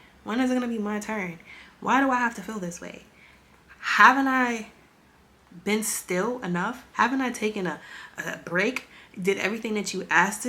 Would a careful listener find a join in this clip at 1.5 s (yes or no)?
no